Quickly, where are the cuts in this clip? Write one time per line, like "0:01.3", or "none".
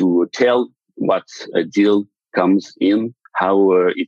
0:01.5

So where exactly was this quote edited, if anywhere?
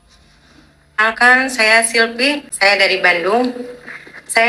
0:01.0
0:02.5

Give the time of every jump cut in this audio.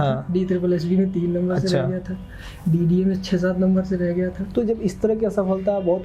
none

